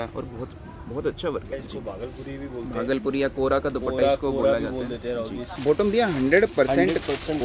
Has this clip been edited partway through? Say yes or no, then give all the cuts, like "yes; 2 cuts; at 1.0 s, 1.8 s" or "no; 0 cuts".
yes; 2 cuts; at 1.6 s, 5.5 s